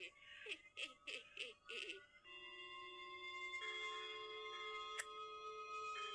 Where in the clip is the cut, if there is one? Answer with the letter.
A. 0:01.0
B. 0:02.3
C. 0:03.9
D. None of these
B